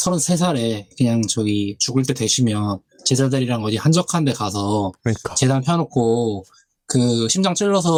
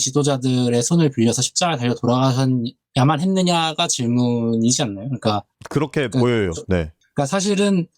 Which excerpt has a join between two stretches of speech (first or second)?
second